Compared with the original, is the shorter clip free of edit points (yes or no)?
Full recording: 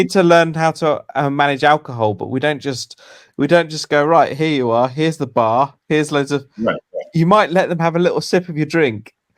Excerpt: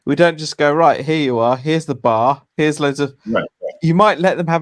yes